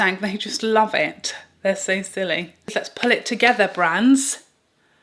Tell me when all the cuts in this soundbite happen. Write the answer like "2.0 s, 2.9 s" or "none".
2.7 s